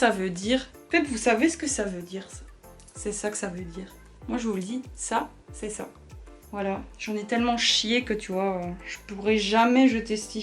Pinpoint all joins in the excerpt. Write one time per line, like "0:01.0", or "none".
none